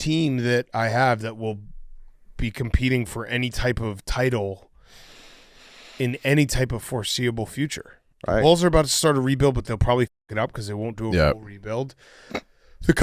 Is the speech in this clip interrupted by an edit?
yes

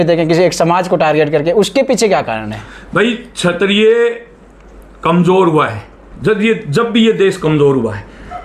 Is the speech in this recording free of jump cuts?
yes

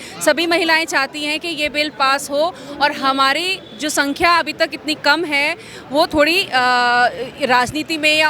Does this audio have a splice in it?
no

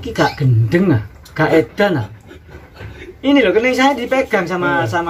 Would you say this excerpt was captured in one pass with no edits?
yes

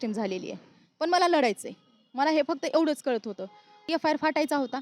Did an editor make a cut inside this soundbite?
yes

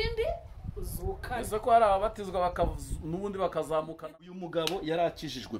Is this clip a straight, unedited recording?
no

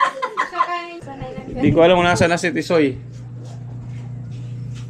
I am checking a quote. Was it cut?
yes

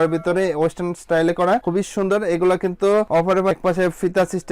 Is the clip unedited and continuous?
no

